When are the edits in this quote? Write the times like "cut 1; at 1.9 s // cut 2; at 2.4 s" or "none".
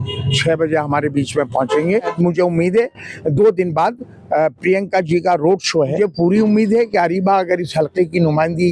cut 1; at 2.1 s // cut 2; at 5.9 s